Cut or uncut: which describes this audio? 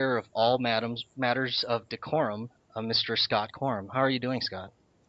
cut